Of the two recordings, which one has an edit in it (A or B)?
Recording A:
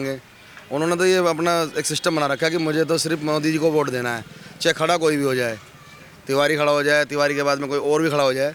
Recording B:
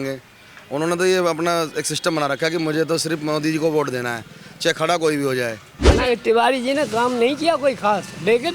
B